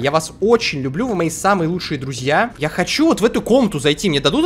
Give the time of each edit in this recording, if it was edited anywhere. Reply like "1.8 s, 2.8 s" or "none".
2.5 s

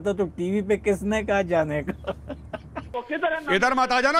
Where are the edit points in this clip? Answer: 2.8 s

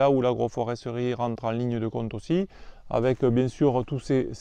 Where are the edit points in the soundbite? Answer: none

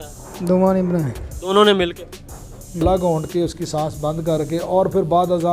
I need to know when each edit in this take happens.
2.8 s

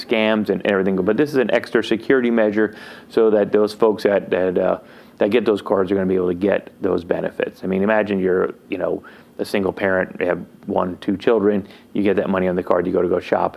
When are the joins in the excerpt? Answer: none

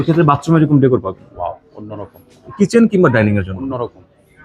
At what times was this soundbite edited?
2.5 s

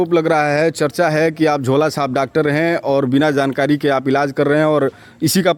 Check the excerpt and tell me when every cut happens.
none

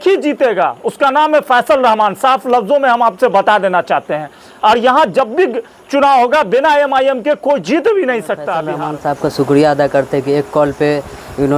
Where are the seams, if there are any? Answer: 8.6 s

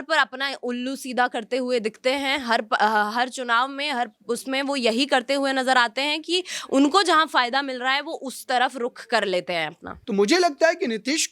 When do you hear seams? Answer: 9.9 s

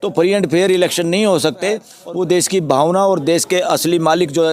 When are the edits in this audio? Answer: 2.0 s

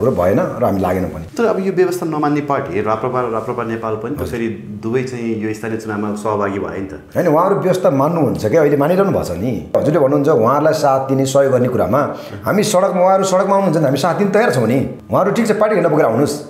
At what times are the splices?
1.2 s, 9.7 s, 15.0 s

